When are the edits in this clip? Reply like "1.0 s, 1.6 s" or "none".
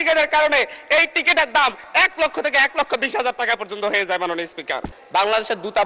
4.9 s